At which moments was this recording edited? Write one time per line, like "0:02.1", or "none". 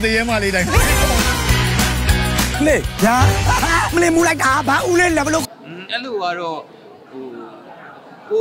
0:05.6